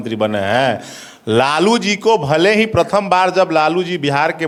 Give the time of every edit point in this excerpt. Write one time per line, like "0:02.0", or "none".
none